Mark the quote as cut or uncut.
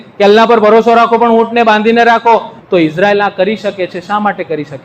cut